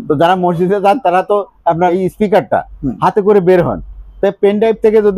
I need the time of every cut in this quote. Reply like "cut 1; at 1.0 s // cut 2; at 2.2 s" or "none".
cut 1; at 1.9 s